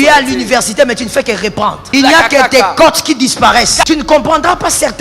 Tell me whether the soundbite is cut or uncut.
cut